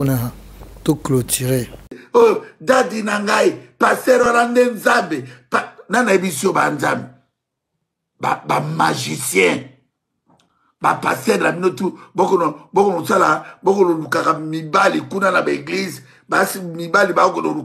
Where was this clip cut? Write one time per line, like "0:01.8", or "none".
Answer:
none